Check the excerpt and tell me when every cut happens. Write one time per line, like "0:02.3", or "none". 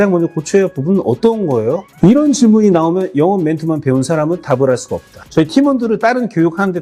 0:05.2